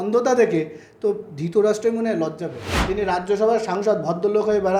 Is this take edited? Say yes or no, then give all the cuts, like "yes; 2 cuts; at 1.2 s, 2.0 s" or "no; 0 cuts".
yes; 1 cut; at 2.8 s